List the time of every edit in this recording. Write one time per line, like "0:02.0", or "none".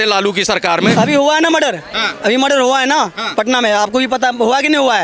0:00.9

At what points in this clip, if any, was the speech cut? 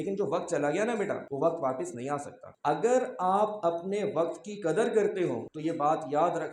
0:01.3
0:02.6
0:05.5

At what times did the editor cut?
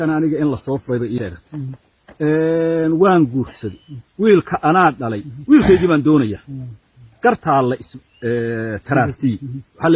0:01.3

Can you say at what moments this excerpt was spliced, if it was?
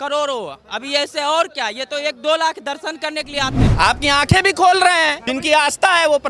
0:03.6
0:05.2

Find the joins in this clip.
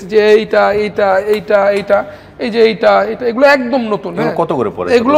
none

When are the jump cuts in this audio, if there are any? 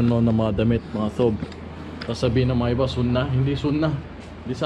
none

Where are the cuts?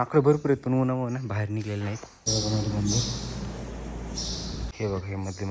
0:02.1
0:04.7

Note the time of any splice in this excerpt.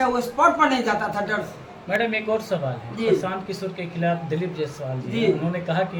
none

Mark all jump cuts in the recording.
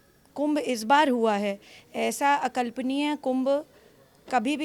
none

